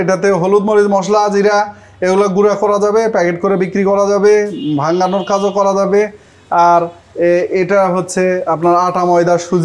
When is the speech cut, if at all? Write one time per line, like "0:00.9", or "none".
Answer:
none